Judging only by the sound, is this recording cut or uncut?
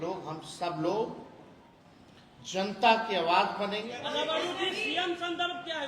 cut